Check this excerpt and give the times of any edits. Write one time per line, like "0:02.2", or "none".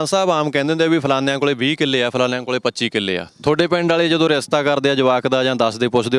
none

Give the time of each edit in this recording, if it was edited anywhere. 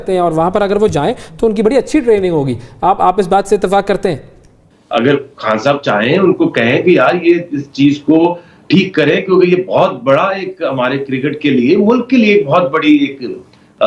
0:04.6

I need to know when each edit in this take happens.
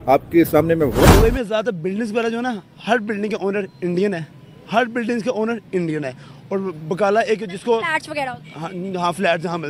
0:01.1

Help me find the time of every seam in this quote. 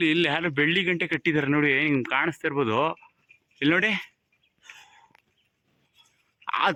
none

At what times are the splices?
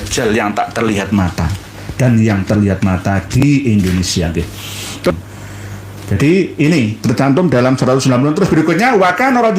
0:05.1

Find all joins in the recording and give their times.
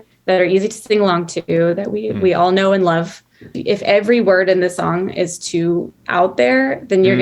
0:03.5

